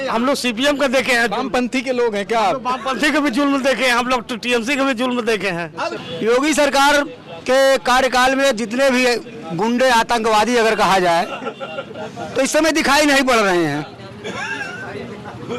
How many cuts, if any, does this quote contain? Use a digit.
1